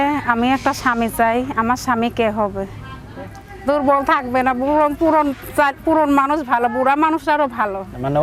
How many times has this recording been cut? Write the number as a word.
one